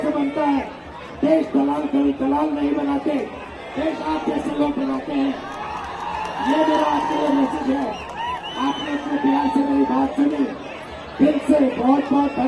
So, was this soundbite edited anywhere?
no; 0 cuts

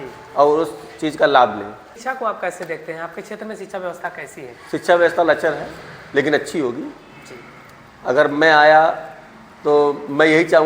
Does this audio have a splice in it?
yes; 1 cut; at 1.9 s

